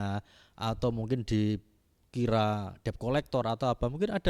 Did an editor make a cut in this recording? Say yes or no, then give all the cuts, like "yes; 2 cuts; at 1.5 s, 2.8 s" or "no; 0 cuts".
no; 0 cuts